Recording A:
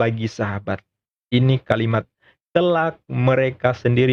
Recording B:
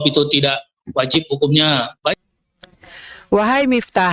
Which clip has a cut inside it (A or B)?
B